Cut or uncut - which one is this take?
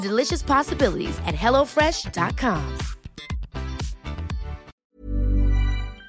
cut